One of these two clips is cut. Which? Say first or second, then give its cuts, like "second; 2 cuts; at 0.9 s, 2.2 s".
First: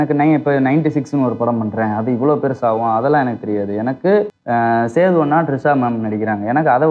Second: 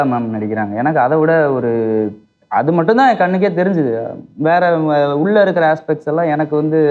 first; 1 cut; at 4.4 s